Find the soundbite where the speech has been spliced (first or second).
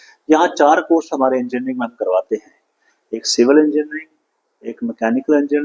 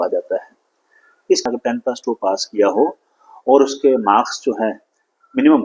second